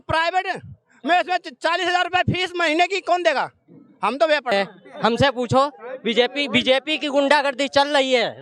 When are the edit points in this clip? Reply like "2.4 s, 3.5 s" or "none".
4.5 s